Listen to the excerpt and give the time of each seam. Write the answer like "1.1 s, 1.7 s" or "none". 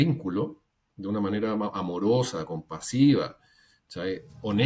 none